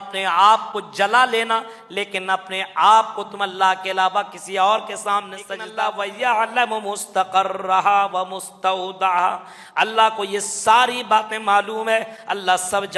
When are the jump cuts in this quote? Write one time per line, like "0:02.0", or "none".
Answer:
0:05.6